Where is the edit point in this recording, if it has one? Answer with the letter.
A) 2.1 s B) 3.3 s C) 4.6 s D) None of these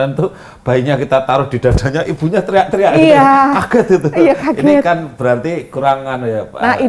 D